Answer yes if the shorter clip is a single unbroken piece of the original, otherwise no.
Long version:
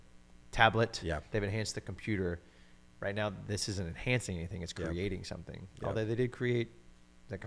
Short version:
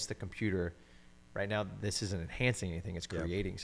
yes